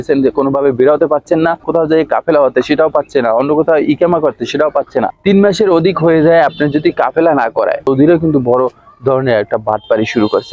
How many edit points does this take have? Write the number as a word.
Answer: three